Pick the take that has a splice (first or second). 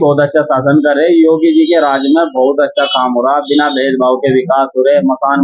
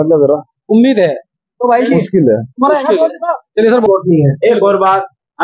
second